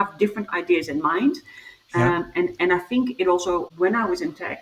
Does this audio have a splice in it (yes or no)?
yes